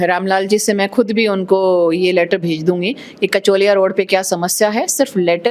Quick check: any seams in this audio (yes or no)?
no